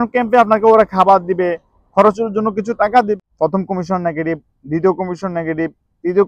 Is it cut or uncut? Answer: cut